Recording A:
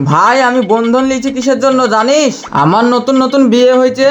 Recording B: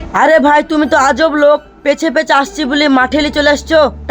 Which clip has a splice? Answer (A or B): A